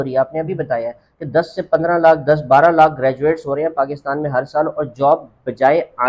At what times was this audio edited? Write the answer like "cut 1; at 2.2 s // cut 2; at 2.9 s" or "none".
none